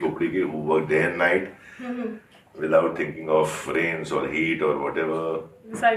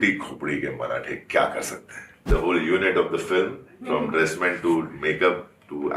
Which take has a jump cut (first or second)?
second